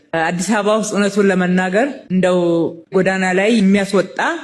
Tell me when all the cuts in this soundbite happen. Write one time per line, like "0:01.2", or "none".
none